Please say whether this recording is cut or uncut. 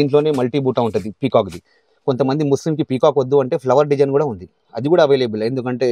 uncut